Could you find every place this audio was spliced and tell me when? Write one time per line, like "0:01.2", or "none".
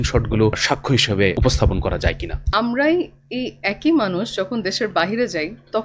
0:00.9
0:02.3